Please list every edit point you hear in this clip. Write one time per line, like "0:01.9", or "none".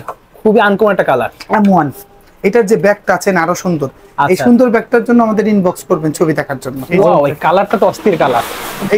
0:06.7